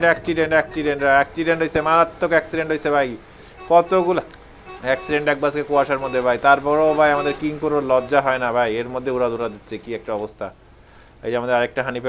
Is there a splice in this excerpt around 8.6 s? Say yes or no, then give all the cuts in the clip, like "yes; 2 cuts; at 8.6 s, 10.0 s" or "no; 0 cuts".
no; 0 cuts